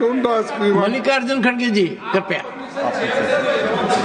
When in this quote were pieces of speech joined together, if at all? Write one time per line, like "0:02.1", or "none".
none

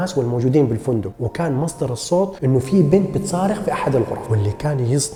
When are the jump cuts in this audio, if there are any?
none

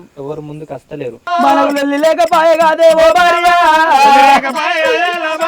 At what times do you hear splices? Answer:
0:01.2

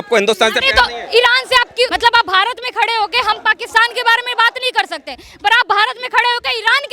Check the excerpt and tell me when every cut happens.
0:01.9

